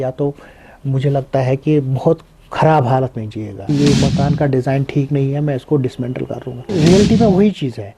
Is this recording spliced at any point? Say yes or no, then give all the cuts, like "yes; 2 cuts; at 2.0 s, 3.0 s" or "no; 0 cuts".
yes; 2 cuts; at 3.6 s, 6.5 s